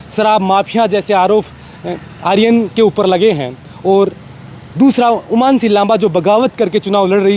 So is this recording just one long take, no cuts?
yes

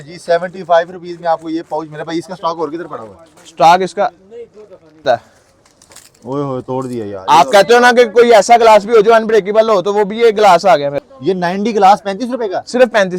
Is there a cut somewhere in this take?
yes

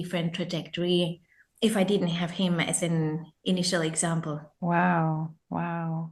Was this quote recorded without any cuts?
yes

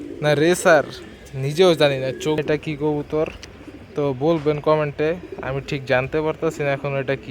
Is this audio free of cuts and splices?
no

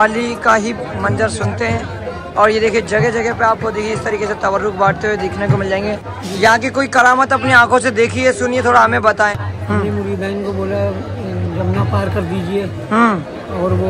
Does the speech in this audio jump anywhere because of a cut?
yes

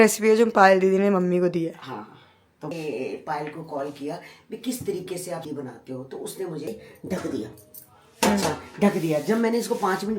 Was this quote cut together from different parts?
yes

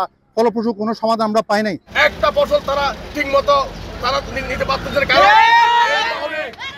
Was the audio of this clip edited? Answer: yes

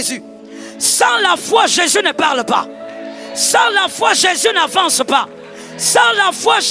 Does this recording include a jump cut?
no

